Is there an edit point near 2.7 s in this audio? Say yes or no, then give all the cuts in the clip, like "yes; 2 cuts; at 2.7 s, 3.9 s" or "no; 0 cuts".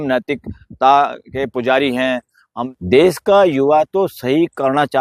yes; 1 cut; at 2.7 s